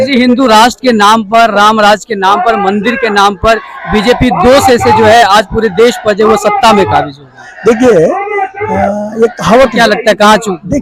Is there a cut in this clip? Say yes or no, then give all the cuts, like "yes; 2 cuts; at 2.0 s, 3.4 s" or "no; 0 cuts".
no; 0 cuts